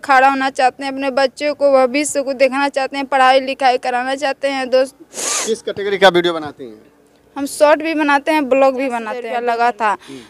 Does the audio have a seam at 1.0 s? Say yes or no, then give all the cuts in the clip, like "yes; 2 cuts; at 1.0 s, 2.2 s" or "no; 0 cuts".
no; 1 cut; at 9.2 s